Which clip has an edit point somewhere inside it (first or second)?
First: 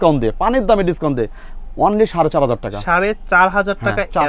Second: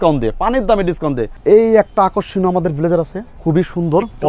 second